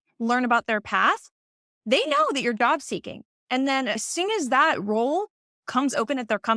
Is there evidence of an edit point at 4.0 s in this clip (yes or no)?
yes